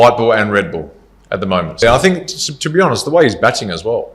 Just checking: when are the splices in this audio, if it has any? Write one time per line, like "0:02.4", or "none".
0:01.8